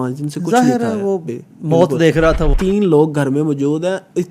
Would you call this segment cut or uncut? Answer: cut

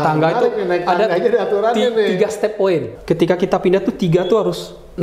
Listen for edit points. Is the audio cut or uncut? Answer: cut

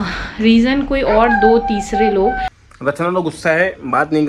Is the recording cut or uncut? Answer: cut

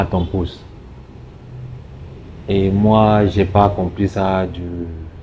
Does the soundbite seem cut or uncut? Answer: uncut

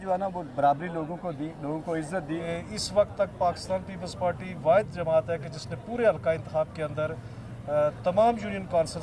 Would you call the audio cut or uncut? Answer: cut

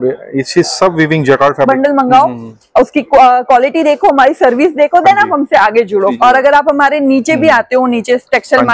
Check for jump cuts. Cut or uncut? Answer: cut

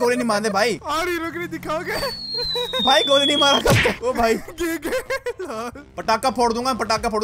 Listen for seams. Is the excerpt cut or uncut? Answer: cut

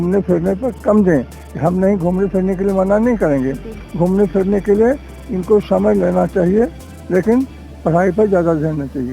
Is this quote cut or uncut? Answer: uncut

